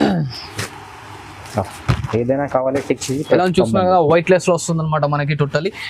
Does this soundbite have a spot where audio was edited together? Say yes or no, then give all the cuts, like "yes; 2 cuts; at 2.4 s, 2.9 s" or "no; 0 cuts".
no; 0 cuts